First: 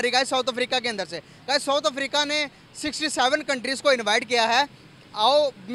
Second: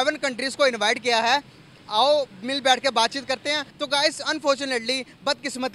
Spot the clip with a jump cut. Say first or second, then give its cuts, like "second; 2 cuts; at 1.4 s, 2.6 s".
second; 1 cut; at 3.7 s